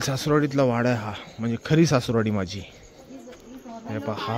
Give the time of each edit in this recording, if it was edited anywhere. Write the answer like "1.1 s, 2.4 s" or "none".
none